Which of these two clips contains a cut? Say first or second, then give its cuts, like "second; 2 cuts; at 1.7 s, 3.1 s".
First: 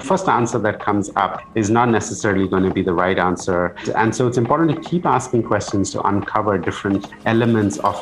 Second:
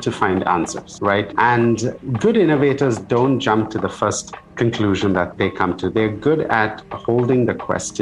first; 1 cut; at 3.9 s